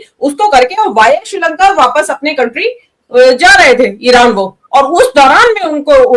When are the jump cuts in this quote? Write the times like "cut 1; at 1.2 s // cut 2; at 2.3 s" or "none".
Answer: none